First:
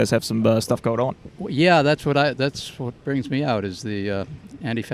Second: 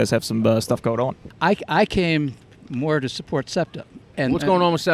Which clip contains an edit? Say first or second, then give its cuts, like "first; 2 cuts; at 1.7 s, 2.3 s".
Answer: second; 2 cuts; at 1.2 s, 4.1 s